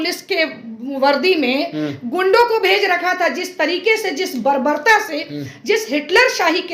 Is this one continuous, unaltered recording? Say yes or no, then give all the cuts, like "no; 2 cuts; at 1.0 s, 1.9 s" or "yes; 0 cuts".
yes; 0 cuts